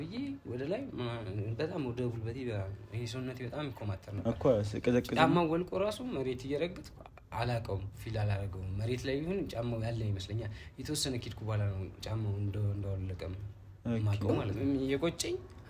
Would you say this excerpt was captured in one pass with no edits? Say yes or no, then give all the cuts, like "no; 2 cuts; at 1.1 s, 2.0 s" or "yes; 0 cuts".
no; 2 cuts; at 4.2 s, 14.3 s